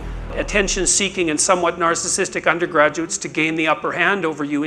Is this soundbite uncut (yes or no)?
yes